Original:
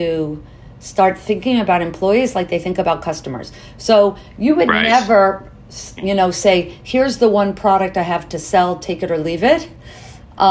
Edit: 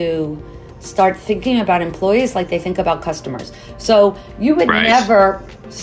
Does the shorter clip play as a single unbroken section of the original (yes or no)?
yes